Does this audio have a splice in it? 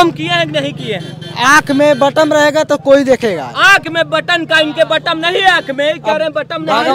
no; 0 cuts

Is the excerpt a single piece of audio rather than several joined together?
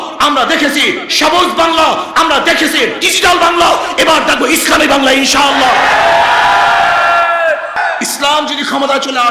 no; 1 cut; at 7.8 s

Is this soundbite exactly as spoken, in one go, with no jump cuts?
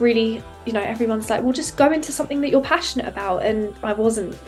yes; 0 cuts

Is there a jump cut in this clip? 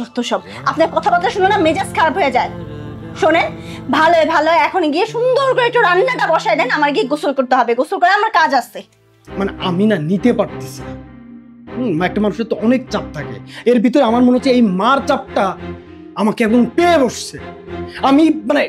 yes; 1 cut; at 9.2 s

